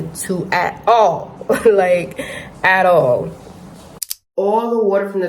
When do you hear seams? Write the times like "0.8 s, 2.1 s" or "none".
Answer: 4.0 s